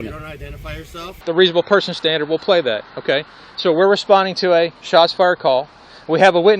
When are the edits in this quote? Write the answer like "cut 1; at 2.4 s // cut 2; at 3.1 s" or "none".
cut 1; at 1.2 s